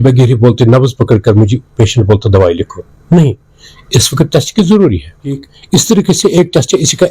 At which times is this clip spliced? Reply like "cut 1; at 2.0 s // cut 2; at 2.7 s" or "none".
cut 1; at 5.5 s